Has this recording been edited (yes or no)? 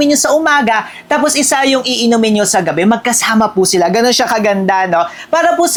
no